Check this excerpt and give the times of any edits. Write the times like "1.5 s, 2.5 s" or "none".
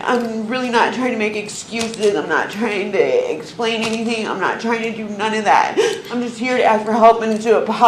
none